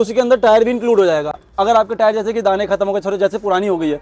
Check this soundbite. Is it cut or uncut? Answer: uncut